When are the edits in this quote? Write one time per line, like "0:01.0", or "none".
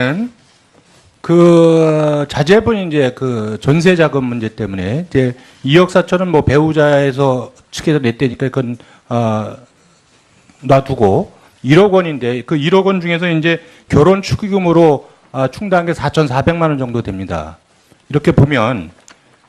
0:01.7